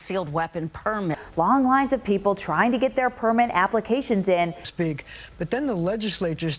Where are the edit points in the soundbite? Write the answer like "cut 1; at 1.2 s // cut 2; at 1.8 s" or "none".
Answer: cut 1; at 4.6 s

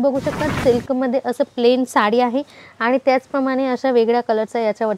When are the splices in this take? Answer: none

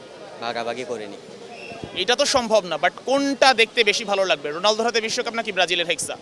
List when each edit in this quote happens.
none

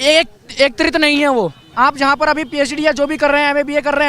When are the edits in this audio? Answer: cut 1; at 1.6 s

